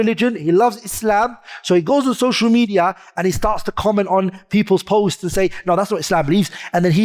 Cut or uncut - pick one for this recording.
uncut